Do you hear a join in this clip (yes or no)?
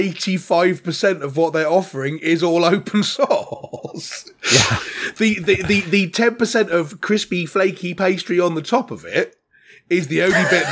no